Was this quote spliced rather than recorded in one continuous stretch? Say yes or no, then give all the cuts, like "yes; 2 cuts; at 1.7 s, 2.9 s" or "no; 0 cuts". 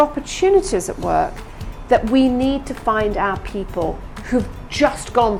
no; 0 cuts